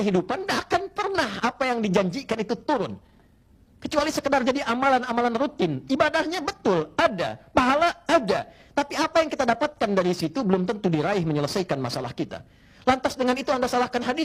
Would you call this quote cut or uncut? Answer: uncut